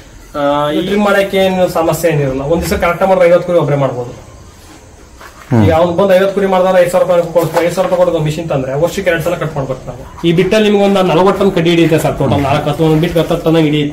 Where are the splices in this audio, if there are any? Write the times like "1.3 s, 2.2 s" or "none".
0.8 s, 10.0 s